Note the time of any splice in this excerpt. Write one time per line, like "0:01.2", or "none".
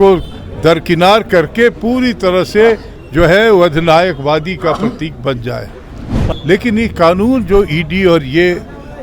0:06.2